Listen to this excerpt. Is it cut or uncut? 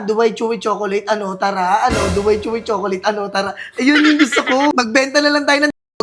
cut